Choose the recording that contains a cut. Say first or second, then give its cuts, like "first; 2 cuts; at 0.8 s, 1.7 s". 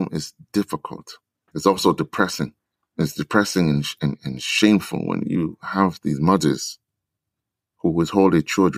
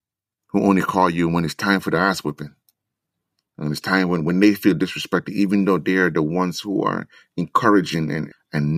first; 1 cut; at 1.4 s